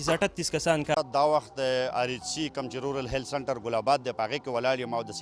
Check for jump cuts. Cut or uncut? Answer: cut